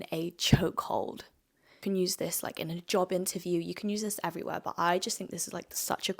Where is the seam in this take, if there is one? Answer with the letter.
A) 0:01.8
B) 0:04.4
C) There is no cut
A